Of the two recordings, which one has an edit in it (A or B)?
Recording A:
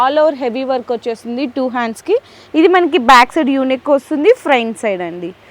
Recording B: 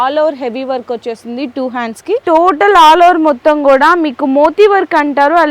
B